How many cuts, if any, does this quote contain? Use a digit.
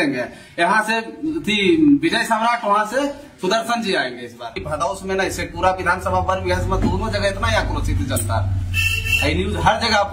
1